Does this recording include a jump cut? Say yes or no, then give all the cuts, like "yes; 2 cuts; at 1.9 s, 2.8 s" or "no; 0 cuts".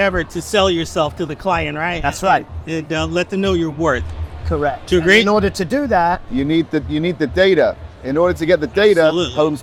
no; 0 cuts